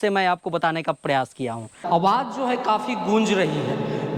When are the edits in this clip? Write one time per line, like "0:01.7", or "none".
0:01.8